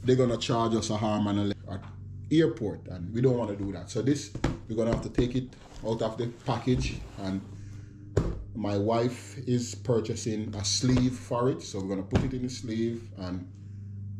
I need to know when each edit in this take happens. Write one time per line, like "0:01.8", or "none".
0:01.6